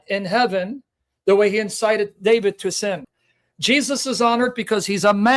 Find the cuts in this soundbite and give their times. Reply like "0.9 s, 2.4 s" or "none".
3.1 s